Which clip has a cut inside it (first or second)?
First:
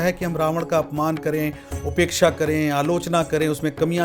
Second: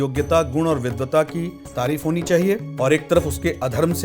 second